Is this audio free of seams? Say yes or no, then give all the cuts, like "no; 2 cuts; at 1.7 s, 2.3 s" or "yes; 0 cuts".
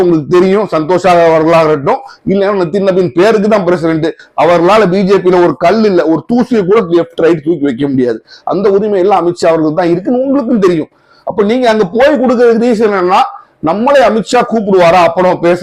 yes; 0 cuts